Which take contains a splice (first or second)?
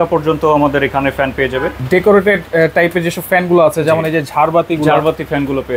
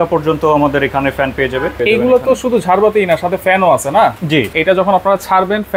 second